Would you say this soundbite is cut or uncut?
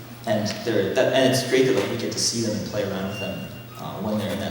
cut